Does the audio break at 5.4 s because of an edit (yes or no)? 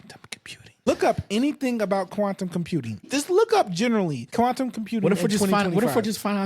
no